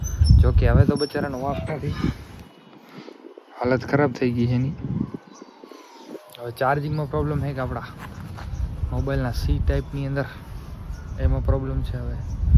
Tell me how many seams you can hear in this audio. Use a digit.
0